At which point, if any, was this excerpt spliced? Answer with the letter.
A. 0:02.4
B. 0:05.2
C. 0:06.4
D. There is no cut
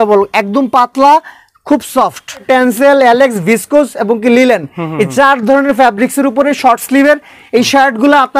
A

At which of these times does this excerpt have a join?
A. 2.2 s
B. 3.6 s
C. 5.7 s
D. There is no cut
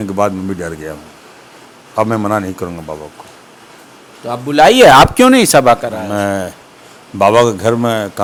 D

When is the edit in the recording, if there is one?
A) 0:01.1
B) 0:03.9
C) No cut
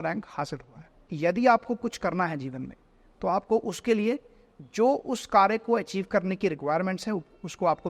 A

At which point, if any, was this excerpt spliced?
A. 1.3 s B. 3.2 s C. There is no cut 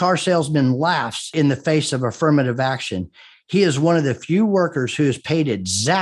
A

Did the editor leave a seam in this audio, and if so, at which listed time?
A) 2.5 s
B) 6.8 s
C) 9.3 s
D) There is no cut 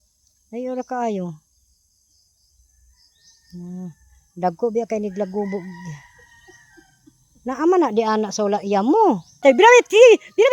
C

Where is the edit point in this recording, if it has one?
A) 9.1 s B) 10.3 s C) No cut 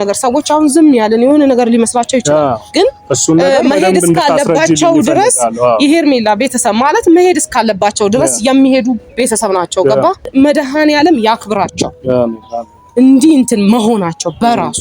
B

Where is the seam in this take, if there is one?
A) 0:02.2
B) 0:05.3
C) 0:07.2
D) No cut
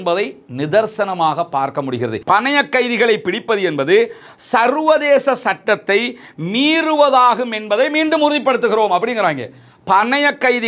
A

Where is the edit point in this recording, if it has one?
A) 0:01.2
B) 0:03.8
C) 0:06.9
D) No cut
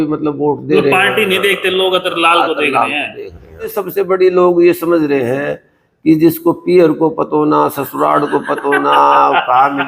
B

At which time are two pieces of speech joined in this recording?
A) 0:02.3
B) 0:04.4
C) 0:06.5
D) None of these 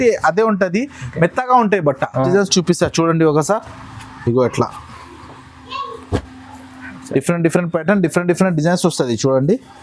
A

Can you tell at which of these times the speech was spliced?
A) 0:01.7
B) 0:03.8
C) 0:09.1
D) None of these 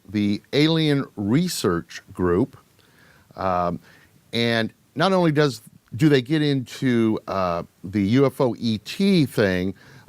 A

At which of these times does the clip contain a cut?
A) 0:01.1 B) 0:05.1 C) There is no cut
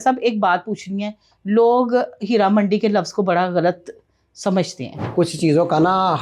B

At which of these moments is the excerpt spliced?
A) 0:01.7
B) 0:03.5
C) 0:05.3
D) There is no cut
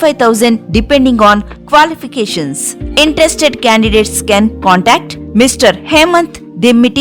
D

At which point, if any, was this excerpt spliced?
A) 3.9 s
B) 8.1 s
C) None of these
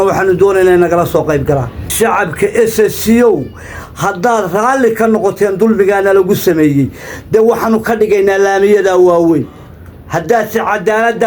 C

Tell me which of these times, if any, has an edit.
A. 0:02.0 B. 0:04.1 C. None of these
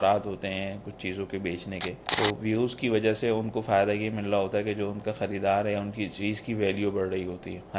A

